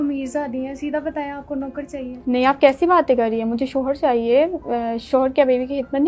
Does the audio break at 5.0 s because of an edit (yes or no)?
no